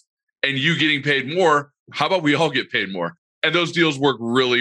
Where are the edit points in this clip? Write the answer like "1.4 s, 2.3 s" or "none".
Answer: 3.3 s